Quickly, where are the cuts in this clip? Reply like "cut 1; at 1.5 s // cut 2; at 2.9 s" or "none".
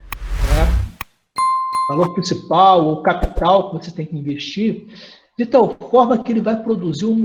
cut 1; at 1.9 s